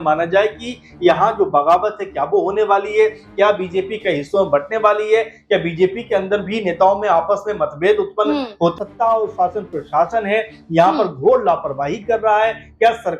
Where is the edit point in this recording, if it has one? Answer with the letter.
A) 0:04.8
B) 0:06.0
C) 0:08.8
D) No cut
C